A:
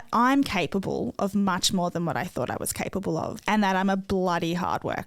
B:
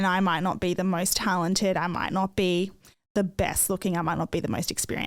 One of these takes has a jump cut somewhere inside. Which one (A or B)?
A